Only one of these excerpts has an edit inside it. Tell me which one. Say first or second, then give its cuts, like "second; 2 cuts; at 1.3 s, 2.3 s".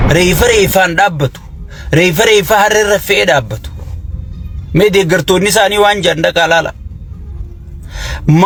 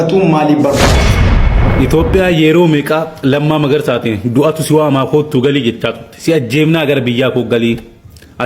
second; 1 cut; at 1.4 s